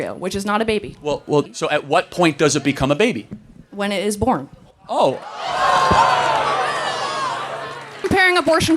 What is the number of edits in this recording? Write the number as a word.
two